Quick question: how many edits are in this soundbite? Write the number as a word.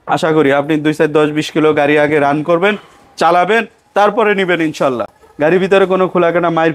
zero